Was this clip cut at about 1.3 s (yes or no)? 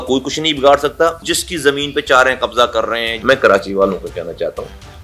yes